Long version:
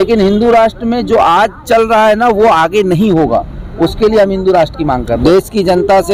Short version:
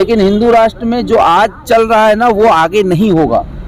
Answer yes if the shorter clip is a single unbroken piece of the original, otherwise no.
yes